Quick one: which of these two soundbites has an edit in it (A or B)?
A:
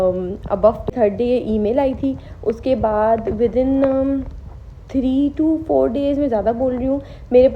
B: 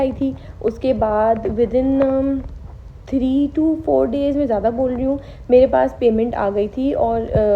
A